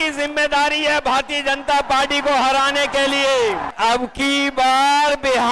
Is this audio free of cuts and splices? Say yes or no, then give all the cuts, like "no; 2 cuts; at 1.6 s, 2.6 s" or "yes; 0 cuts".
no; 1 cut; at 3.7 s